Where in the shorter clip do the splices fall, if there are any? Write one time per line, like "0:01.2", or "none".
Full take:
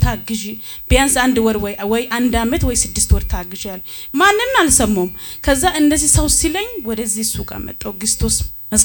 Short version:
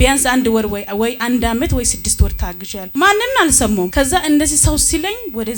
0:02.7
0:03.9